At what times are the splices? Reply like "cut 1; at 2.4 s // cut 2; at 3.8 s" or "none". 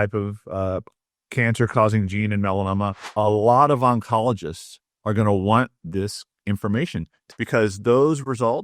cut 1; at 3.0 s // cut 2; at 7.1 s